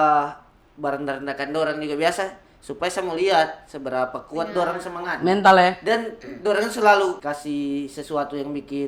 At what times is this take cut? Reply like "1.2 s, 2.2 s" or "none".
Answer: 7.2 s